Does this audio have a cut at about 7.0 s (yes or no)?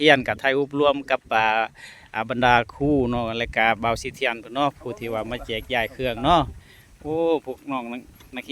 no